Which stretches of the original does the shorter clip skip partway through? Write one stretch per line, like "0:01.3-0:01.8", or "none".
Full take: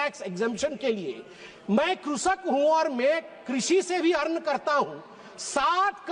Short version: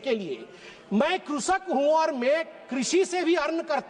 none

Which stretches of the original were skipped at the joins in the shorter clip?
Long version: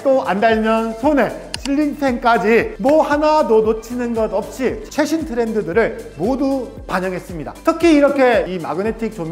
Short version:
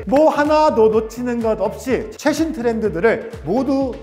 none

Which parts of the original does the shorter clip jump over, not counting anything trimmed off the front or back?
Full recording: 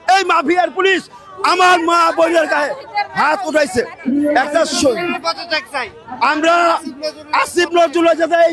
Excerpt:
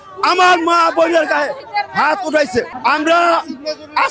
0:03.9-0:06.1

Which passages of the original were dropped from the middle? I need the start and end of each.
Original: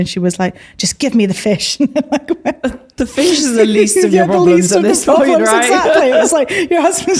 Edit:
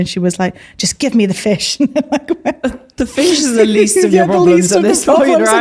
none

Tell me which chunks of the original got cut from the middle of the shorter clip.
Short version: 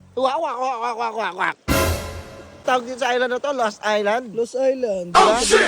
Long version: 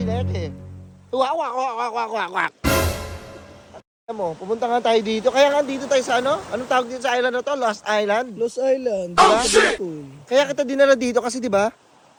0:03.6-0:06.6

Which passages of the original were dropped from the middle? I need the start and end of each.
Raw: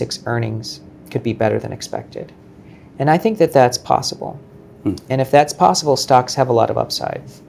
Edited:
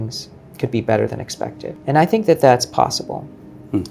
0:02.2-0:02.8

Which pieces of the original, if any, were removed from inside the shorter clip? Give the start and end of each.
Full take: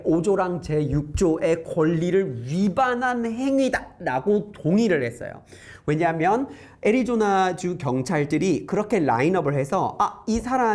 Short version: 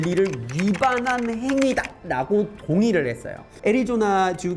0:05.4-0:06.6

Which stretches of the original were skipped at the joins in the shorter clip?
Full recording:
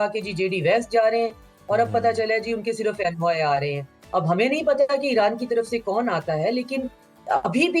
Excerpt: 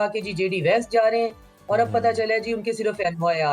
none

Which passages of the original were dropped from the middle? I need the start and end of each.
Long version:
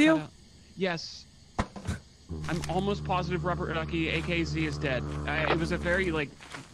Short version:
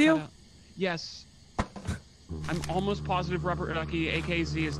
none

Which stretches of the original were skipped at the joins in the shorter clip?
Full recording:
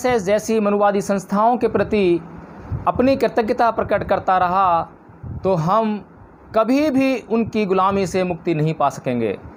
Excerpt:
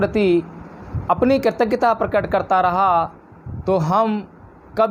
none

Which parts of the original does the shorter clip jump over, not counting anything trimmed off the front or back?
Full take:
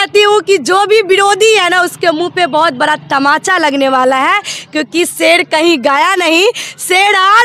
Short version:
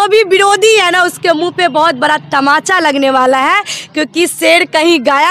none

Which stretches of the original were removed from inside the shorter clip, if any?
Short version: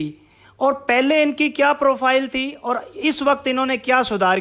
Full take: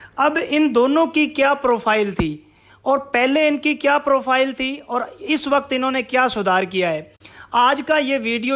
none

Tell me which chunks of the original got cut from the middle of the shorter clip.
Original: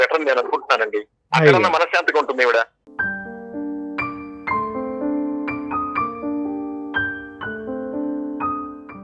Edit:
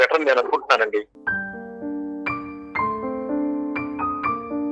0:01.2-0:02.9

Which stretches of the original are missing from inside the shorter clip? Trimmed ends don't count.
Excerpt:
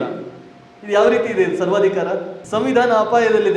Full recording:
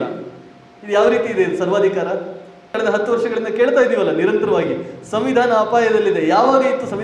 0:02.4-0:05.0

